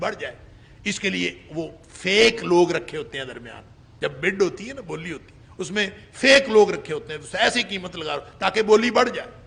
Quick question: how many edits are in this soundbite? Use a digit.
0